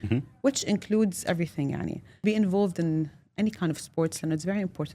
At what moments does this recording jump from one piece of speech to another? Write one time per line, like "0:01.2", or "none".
0:02.2